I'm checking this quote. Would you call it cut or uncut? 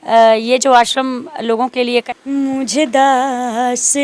cut